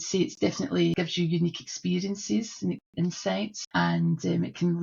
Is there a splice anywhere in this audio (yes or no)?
yes